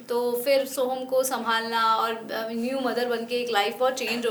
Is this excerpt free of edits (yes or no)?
yes